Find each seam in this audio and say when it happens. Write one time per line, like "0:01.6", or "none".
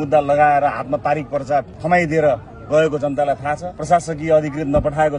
0:01.8
0:03.7